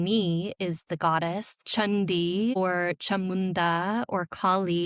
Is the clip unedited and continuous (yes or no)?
no